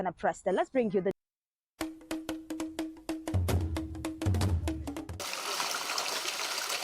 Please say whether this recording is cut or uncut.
cut